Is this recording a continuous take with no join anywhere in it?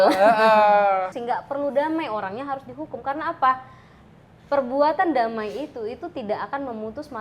no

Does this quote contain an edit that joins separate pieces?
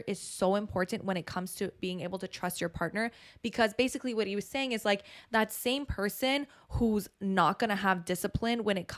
no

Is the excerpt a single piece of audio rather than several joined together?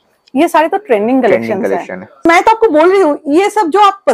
no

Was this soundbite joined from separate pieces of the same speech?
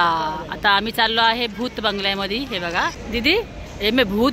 yes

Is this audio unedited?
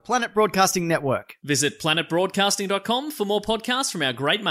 yes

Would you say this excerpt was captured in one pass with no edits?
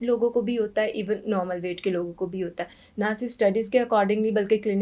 yes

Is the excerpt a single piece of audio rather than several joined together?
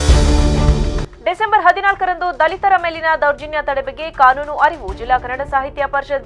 yes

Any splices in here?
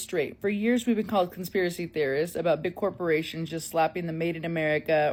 no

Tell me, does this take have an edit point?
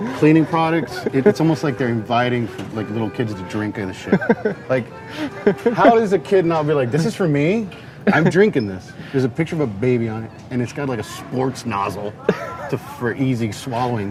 no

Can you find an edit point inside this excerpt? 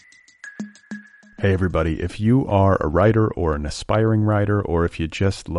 yes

